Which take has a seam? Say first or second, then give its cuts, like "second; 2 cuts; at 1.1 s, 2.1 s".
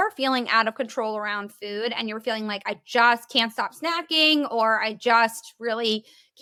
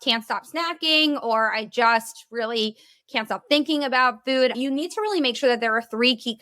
second; 1 cut; at 4.6 s